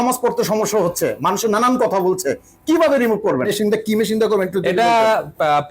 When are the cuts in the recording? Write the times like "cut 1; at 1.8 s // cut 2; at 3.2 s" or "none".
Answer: cut 1; at 3.5 s